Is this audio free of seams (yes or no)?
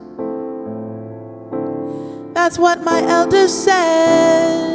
yes